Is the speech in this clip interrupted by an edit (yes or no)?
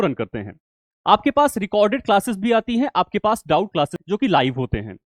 yes